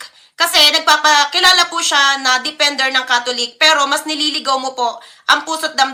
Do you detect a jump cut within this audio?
no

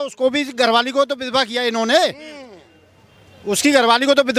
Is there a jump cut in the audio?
no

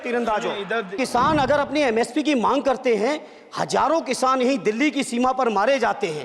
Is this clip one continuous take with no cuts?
no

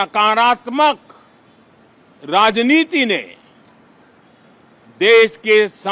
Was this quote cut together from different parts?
no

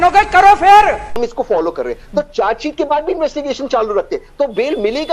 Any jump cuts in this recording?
yes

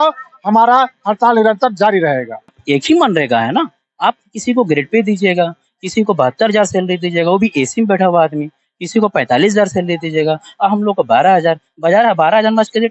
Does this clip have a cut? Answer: yes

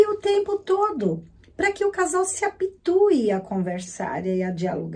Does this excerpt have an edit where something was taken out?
no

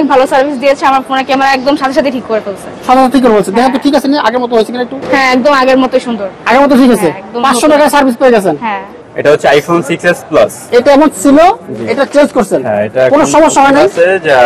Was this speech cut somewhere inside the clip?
yes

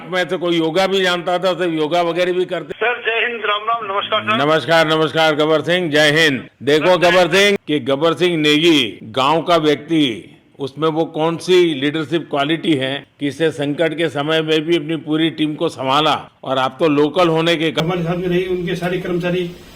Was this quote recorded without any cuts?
no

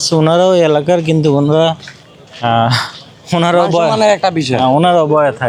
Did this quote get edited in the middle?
no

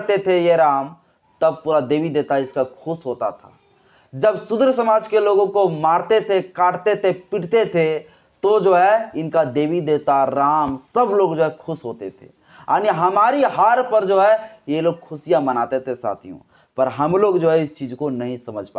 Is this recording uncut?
yes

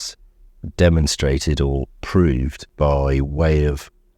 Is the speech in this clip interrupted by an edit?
yes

